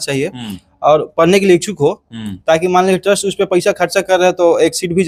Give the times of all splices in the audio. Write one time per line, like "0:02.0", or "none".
none